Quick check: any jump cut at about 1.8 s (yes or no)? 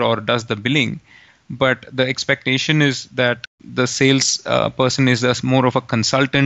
no